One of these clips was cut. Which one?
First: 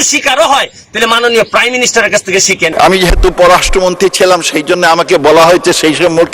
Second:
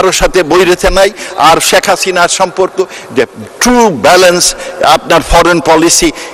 first; 1 cut; at 2.7 s

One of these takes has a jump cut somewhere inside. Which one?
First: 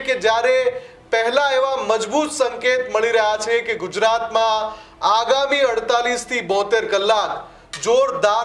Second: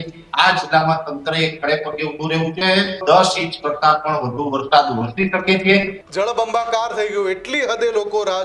second; 2 cuts; at 3.0 s, 6.0 s

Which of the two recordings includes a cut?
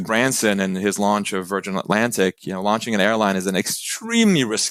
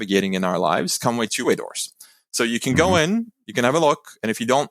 second; 1 cut; at 1.4 s

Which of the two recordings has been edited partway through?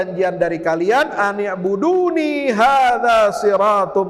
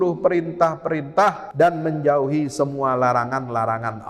second; 1 cut; at 1.4 s

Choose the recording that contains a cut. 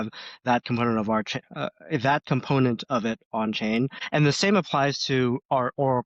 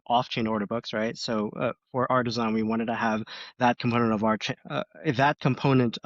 first; 1 cut; at 4.0 s

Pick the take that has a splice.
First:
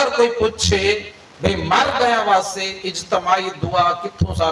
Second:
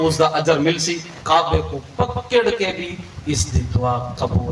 second; 1 cut; at 1.1 s

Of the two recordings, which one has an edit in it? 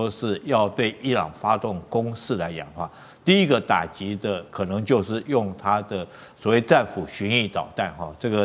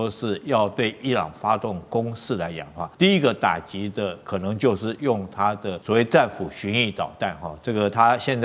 second; 2 cuts; at 2.8 s, 5.7 s

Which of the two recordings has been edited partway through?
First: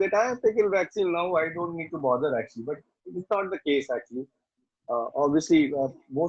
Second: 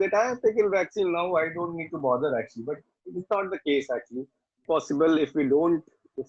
second; 1 cut; at 4.6 s

